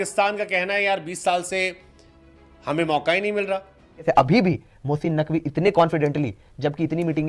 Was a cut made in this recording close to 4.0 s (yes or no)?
yes